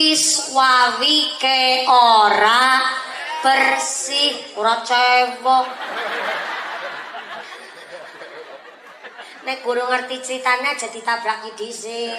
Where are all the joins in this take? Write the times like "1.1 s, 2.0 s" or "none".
none